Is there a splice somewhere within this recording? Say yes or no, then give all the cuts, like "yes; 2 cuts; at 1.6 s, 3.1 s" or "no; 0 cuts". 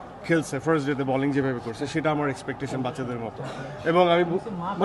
no; 0 cuts